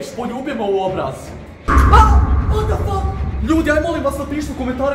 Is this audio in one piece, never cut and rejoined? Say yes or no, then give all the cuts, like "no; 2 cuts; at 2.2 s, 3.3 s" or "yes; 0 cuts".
no; 1 cut; at 3.3 s